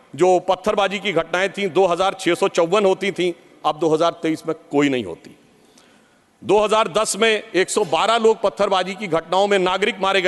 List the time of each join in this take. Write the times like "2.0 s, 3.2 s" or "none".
none